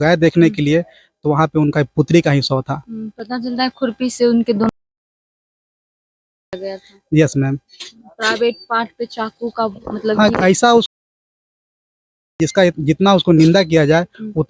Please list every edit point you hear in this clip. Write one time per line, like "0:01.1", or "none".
none